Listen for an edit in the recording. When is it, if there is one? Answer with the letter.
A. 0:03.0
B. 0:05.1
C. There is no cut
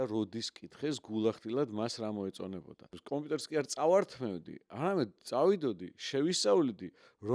A